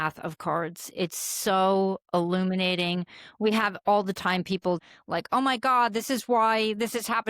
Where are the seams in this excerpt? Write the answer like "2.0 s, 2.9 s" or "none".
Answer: 4.8 s